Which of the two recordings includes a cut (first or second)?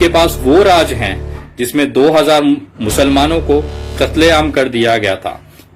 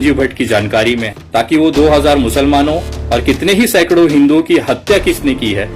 second